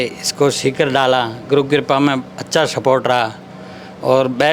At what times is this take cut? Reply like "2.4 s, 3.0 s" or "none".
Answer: none